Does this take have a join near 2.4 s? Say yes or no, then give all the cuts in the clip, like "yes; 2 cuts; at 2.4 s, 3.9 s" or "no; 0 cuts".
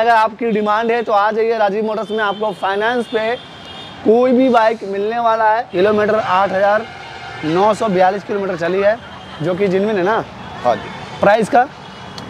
no; 1 cut; at 5.7 s